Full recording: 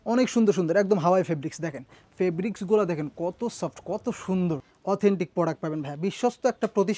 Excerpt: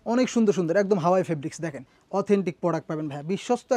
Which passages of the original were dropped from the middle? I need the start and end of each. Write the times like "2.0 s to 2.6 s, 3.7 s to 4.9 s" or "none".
2.0 s to 4.7 s